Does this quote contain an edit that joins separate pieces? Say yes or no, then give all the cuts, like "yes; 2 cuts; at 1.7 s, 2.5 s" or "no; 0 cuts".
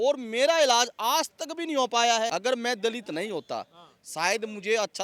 yes; 1 cut; at 2.3 s